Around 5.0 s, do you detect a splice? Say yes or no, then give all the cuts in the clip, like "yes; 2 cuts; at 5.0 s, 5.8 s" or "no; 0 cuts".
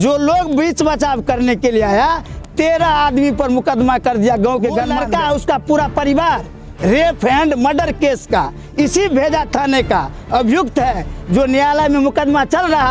yes; 1 cut; at 5.0 s